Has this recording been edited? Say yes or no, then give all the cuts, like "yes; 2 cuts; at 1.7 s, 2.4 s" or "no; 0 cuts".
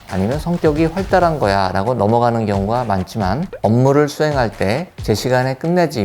yes; 1 cut; at 3.5 s